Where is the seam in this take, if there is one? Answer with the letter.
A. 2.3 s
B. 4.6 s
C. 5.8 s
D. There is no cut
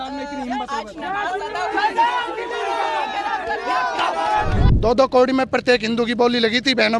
B